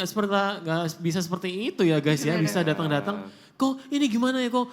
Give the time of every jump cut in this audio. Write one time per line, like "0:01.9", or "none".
none